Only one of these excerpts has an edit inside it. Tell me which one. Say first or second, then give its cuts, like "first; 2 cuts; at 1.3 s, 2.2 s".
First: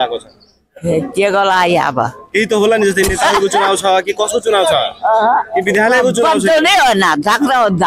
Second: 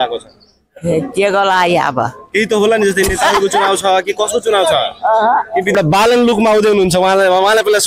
second; 1 cut; at 5.8 s